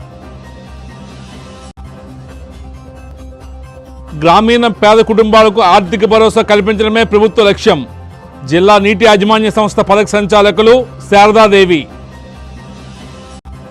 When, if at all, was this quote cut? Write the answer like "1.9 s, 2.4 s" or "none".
11.9 s